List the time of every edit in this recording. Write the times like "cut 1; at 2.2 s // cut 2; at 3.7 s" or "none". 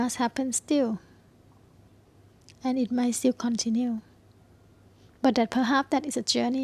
none